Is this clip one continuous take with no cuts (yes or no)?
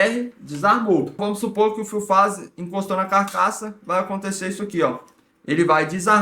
no